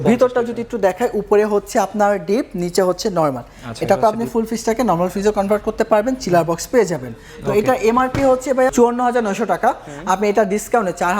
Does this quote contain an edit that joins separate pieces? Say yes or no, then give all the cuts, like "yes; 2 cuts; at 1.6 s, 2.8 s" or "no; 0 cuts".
yes; 1 cut; at 8.7 s